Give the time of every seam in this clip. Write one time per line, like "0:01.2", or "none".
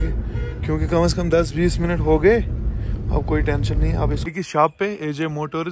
0:04.2